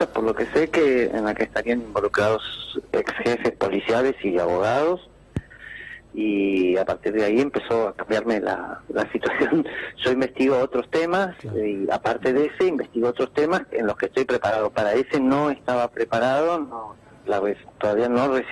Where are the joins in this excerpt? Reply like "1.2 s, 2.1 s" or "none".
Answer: 15.4 s